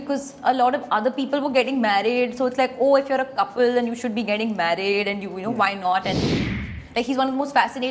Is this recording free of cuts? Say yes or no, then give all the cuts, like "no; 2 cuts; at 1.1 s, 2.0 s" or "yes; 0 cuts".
no; 1 cut; at 6.7 s